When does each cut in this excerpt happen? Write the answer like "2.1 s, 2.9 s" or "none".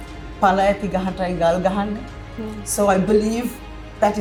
none